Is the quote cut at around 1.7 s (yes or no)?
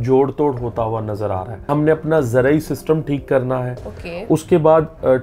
yes